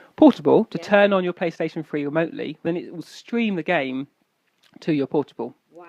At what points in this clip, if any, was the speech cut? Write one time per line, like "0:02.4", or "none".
0:02.7